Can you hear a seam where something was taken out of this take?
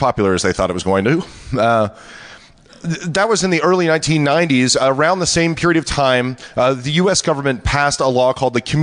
no; 0 cuts

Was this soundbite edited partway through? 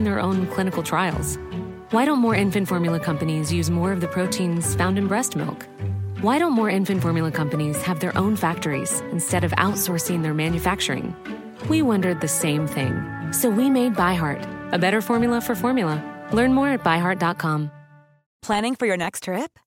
no; 0 cuts

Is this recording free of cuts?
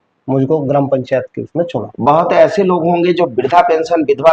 yes; 0 cuts

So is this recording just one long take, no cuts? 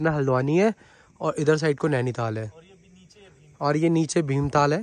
yes; 0 cuts

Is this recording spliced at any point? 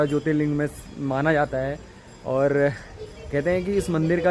no; 0 cuts

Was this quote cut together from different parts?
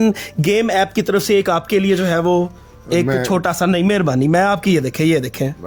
no; 0 cuts

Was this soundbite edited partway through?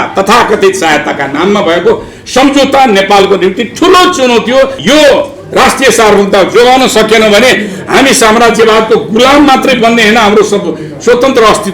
yes; 1 cut; at 4.8 s

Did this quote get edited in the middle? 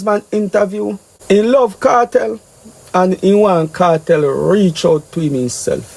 yes; 1 cut; at 1.1 s

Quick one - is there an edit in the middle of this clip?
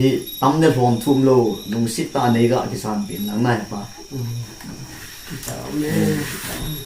no; 0 cuts

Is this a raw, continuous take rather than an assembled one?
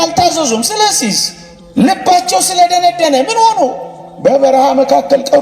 yes; 0 cuts

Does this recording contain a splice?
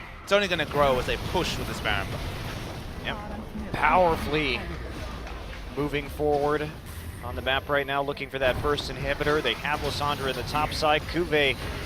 yes; 1 cut; at 3.4 s

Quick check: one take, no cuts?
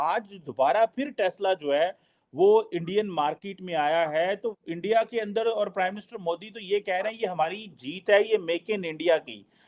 yes; 0 cuts

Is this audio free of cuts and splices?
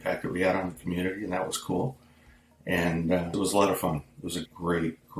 yes; 0 cuts

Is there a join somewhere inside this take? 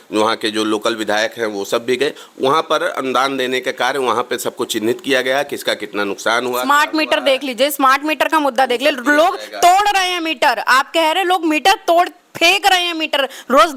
no; 0 cuts

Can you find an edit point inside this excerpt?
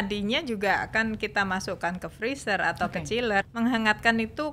yes; 1 cut; at 3.5 s

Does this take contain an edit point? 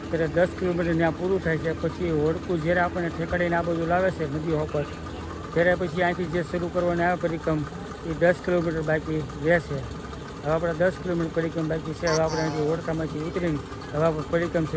no; 0 cuts

